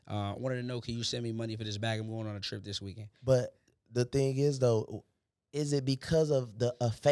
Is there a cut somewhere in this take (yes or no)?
no